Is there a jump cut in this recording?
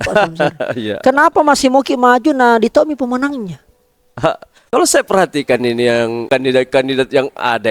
yes; 2 cuts; at 4.5 s, 6.2 s

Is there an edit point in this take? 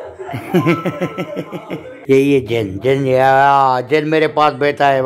yes; 1 cut; at 1.9 s

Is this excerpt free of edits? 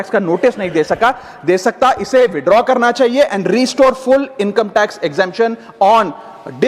yes; 0 cuts

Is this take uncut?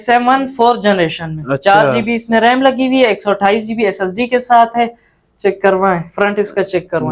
yes; 0 cuts

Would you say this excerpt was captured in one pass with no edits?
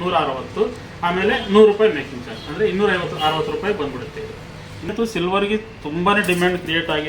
no; 1 cut; at 4.9 s

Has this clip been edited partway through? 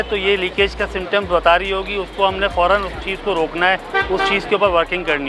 no; 0 cuts

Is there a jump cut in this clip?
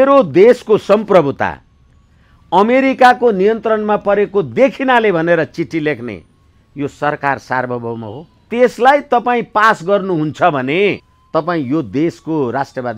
yes; 2 cuts; at 8.5 s, 11.1 s

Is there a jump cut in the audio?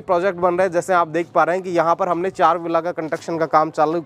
no; 0 cuts

